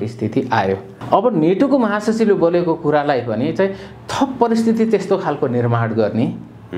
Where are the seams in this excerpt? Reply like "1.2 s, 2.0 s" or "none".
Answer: 0.9 s